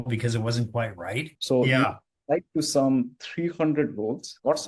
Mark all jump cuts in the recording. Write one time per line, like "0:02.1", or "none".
0:01.3

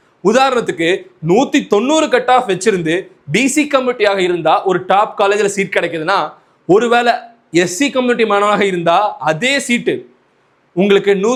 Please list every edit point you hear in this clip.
none

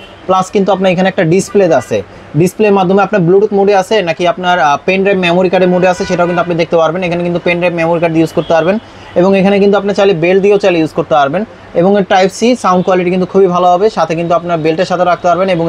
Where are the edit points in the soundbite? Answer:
none

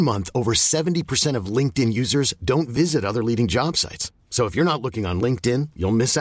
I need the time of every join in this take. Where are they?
none

